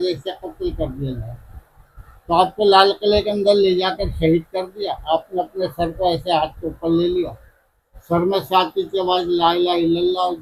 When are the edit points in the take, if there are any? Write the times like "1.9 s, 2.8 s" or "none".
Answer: none